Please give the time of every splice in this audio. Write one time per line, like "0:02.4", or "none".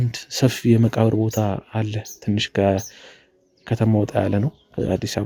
none

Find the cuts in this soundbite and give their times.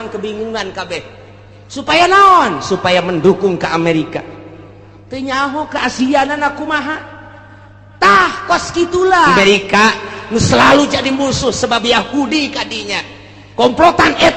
0:09.3

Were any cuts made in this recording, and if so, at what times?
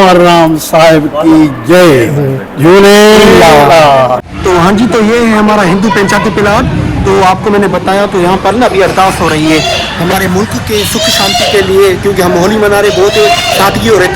0:04.3

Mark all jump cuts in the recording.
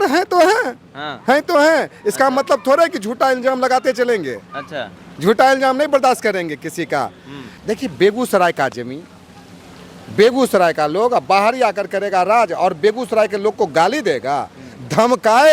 0:07.6

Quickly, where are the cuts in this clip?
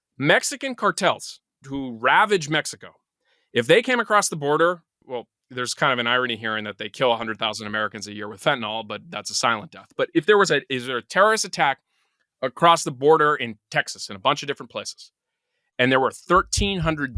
0:01.6
0:05.0

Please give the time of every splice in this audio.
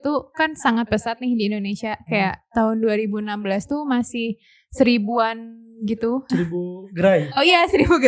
0:06.2

